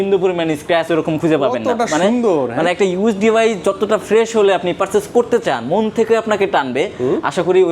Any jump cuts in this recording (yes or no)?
no